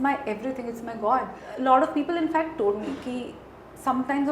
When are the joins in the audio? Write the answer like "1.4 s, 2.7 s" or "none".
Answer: 1.4 s